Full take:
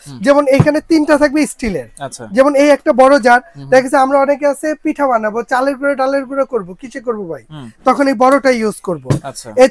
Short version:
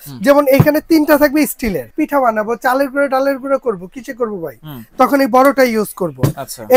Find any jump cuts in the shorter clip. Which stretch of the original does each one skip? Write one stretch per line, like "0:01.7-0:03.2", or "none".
0:01.9-0:04.8